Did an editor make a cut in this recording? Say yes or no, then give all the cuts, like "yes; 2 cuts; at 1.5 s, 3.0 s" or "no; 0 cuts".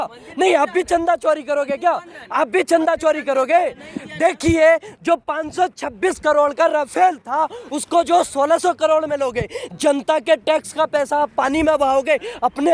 no; 0 cuts